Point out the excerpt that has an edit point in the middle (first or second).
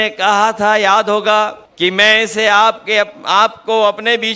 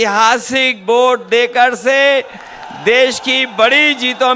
first